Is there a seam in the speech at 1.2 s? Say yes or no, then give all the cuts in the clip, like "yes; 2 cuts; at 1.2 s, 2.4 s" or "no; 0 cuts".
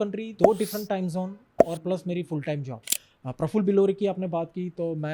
no; 1 cut; at 2.8 s